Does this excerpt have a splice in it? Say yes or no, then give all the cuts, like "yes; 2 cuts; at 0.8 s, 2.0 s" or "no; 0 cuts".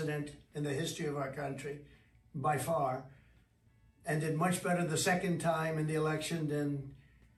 no; 0 cuts